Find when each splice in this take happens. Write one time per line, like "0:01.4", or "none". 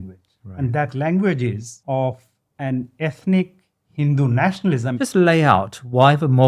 0:01.7
0:04.9

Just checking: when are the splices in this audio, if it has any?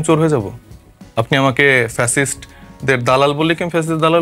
none

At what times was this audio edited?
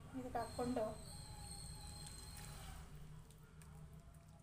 none

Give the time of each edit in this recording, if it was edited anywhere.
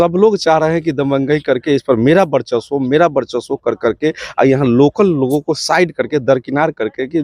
none

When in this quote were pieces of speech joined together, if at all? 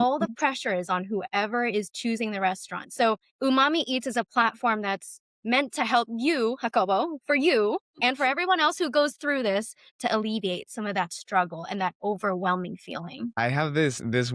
none

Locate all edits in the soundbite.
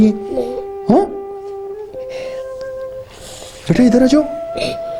0:01.1
0:03.1

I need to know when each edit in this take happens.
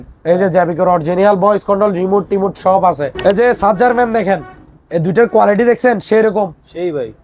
0:03.1

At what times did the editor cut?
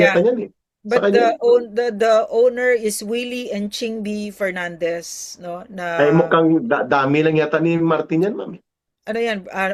none

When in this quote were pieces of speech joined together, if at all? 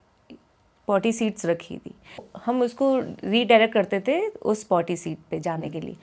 0:02.3

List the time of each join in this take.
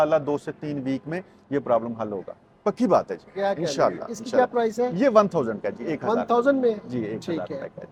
none

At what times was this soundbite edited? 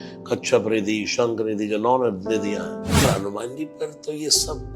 0:03.0

